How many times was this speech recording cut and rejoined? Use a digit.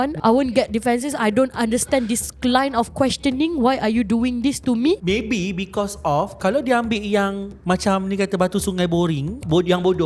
1